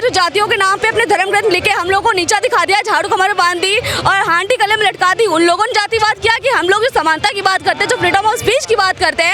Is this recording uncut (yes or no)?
yes